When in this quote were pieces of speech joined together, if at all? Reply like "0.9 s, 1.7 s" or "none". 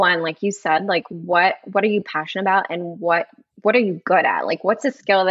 3.4 s